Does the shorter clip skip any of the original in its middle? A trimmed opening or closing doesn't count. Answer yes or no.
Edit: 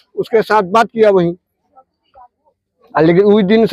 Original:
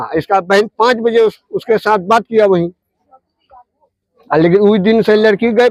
no